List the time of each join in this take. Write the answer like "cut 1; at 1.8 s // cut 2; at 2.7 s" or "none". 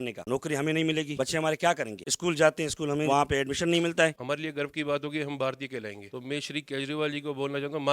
cut 1; at 3.1 s // cut 2; at 4.2 s // cut 3; at 6.0 s